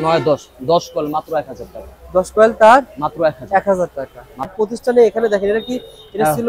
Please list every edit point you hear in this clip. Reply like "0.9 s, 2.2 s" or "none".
4.5 s